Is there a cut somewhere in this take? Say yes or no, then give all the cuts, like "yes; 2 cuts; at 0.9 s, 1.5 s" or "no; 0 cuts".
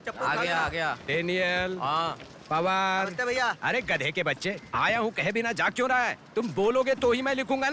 no; 0 cuts